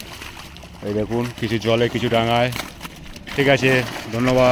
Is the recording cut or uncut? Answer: uncut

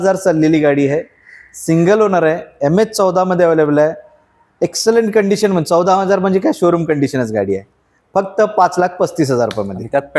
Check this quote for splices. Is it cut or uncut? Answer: uncut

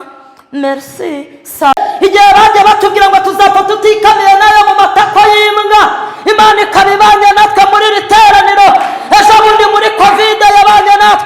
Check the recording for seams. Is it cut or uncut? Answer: cut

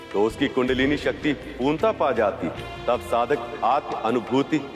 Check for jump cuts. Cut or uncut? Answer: cut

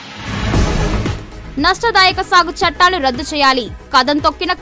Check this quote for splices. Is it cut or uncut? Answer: uncut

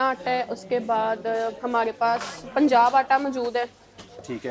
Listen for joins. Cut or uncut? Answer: uncut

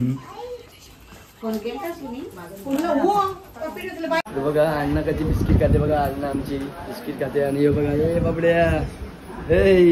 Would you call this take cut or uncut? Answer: cut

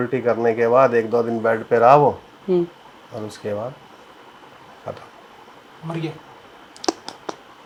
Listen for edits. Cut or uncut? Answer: uncut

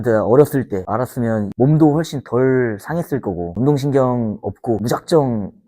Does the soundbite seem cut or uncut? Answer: cut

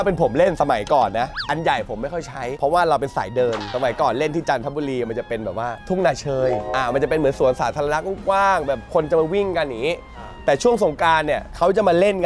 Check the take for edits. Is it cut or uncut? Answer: uncut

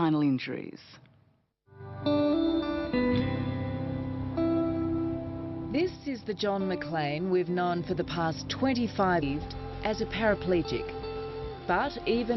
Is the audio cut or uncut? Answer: uncut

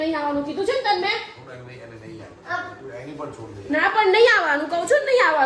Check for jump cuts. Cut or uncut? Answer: uncut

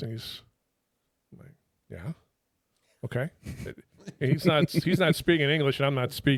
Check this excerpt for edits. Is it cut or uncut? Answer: uncut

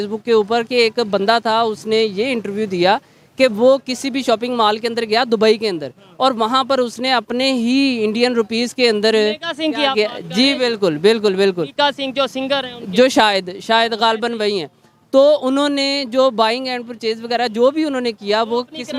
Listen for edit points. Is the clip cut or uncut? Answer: uncut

